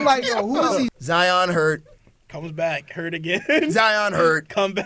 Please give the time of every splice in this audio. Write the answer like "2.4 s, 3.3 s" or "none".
1.0 s